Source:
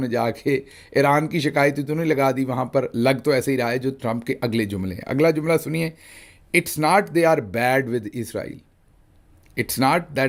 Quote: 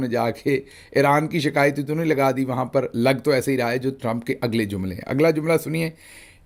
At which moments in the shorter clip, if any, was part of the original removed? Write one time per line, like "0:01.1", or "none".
none